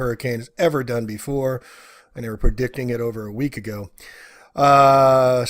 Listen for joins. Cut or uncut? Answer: cut